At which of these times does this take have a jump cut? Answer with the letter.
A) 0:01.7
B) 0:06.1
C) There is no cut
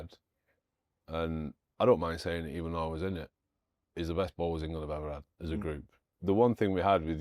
B